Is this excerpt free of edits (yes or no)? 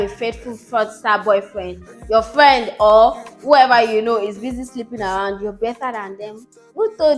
yes